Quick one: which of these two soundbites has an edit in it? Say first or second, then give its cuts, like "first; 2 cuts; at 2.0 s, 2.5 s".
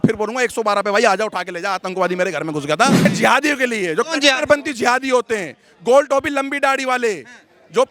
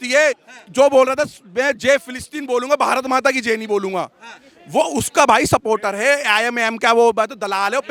first; 1 cut; at 3.1 s